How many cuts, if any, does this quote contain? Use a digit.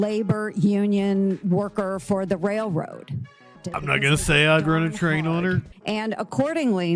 2